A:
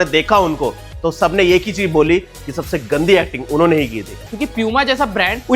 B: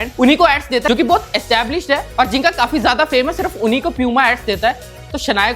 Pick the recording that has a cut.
A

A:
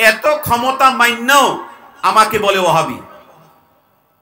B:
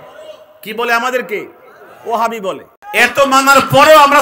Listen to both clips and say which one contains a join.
B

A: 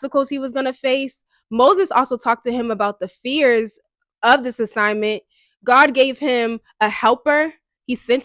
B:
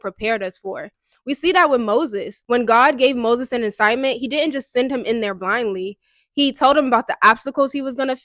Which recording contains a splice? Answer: B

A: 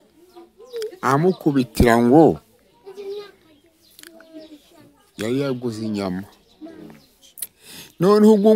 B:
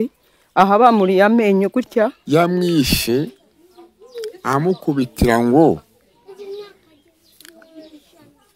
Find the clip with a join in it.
B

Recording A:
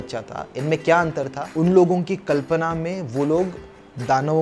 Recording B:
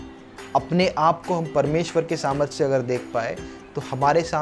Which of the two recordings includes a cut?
A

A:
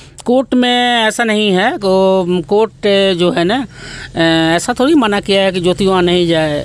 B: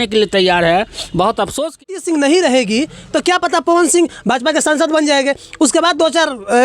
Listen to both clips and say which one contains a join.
B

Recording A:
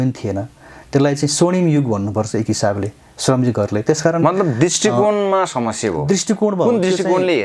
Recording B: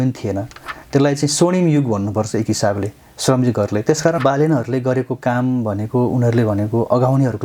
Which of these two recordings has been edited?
B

